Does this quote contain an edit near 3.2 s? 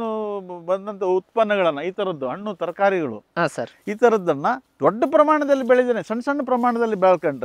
no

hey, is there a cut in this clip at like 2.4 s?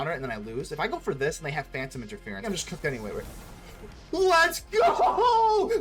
yes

